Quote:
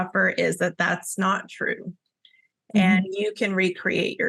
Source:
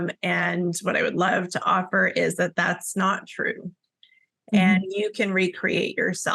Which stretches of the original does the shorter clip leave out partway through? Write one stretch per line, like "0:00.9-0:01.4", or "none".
none

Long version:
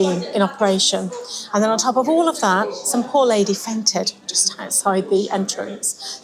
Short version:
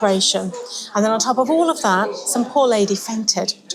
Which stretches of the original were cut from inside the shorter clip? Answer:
none

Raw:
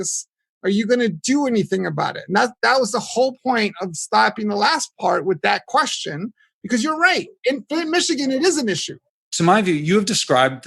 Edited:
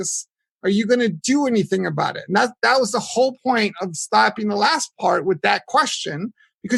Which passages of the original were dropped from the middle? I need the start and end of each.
none

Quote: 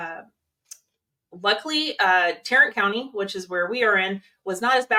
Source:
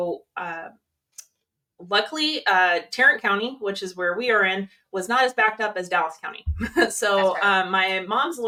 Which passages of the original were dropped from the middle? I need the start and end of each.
none

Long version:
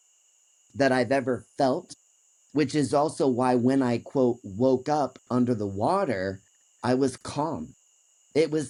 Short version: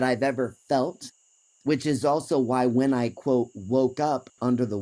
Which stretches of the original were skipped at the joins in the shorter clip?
none

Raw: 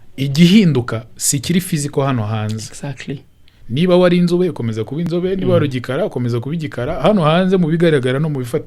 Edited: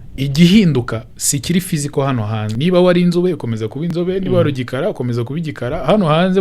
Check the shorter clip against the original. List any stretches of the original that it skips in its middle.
0:02.5-0:03.7

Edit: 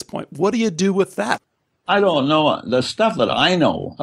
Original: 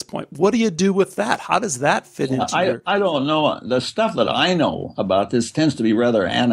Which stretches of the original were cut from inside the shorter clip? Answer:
0:01.8-0:02.8

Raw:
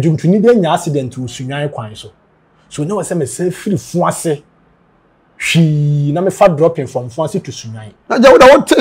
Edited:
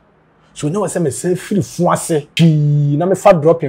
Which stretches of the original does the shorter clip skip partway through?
0:04.4-0:05.4

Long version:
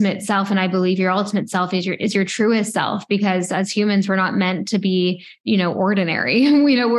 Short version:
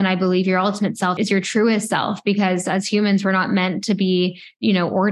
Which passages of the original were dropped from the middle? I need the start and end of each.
0:01.7-0:02.0

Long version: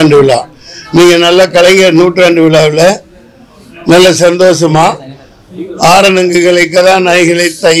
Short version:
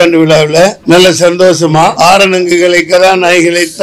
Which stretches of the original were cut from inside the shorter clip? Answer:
0:03.0-0:03.8
0:04.9-0:05.8

